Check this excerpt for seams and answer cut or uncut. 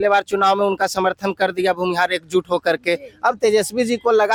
uncut